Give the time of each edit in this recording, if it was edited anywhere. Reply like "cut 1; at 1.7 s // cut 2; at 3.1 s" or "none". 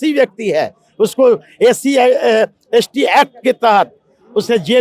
none